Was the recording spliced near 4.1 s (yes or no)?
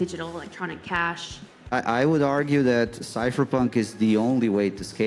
no